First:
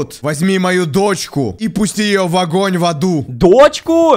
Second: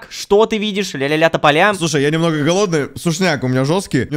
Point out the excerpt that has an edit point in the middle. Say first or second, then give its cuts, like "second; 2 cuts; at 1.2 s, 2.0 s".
second; 1 cut; at 1.8 s